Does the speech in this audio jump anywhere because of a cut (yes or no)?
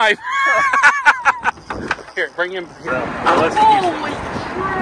yes